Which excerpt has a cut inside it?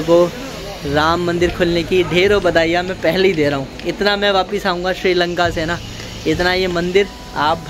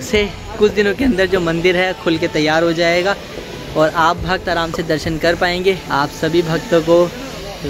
second; 1 cut; at 5.8 s

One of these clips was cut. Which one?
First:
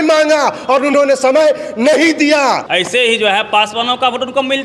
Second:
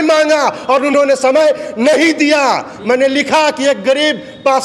first; 1 cut; at 2.7 s

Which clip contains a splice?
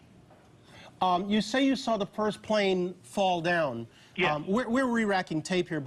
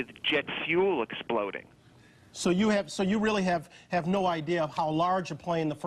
first; 1 cut; at 1.2 s

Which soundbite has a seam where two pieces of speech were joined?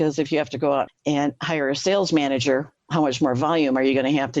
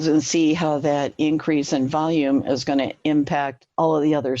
first; 2 cuts; at 0.9 s, 2.8 s

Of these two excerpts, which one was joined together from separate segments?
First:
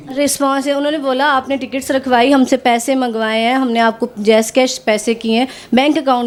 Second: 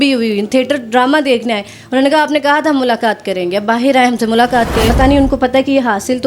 second; 1 cut; at 4.9 s

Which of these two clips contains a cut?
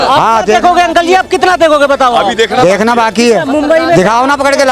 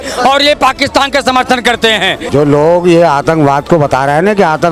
second; 1 cut; at 2.2 s

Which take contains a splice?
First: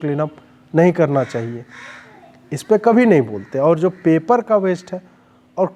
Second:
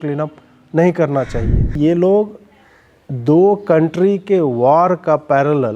second; 1 cut; at 1.7 s

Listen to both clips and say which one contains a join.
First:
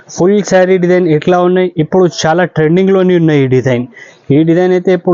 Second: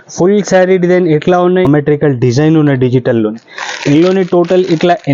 second; 1 cut; at 1.7 s

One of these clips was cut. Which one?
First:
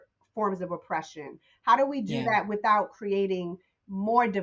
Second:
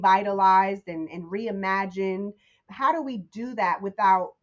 second; 1 cut; at 2.5 s

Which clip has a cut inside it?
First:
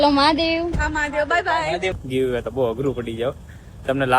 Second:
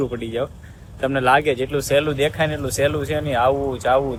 first; 1 cut; at 1.9 s

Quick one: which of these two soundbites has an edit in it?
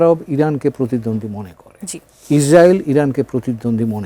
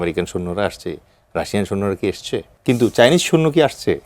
second; 1 cut; at 2.5 s

